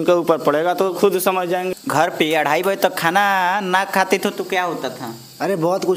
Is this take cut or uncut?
cut